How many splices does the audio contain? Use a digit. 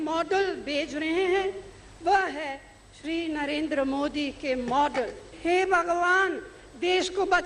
1